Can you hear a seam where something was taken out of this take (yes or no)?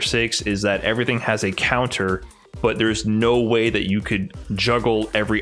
no